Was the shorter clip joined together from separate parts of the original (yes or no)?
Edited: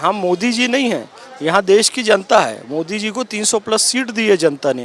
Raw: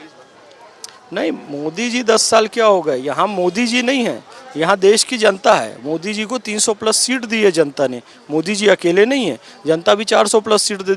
no